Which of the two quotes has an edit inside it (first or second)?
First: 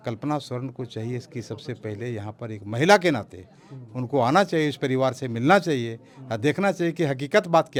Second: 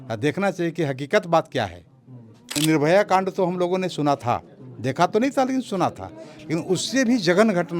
second